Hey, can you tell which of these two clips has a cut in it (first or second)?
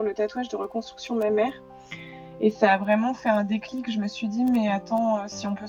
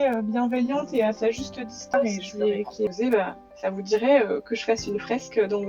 second